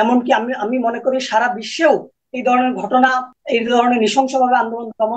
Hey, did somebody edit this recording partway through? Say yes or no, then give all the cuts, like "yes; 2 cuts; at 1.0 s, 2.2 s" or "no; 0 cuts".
yes; 1 cut; at 3.3 s